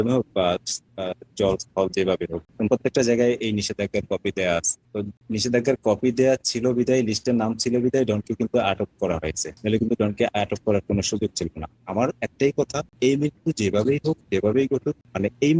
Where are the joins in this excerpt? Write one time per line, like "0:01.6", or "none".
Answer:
0:11.7